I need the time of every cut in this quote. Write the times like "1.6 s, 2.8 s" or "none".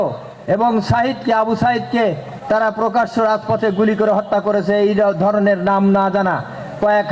none